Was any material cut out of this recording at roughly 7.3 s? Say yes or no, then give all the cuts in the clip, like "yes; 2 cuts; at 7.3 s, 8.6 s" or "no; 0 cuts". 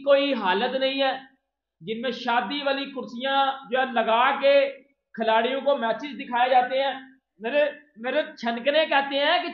yes; 1 cut; at 7.3 s